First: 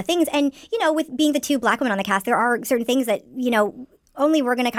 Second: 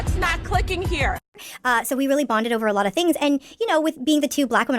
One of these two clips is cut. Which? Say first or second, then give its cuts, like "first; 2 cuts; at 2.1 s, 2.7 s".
second; 1 cut; at 1.3 s